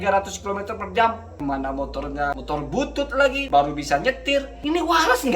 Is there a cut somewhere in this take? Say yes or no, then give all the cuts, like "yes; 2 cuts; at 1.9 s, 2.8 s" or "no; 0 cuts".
yes; 4 cuts; at 1.3 s, 2.3 s, 3.4 s, 4.5 s